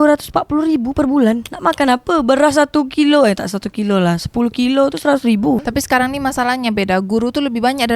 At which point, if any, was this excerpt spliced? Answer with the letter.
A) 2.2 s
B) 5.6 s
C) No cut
B